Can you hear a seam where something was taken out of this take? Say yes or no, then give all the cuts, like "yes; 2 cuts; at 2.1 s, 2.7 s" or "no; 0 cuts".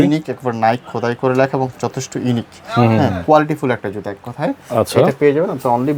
no; 0 cuts